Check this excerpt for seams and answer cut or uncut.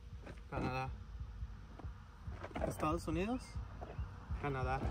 uncut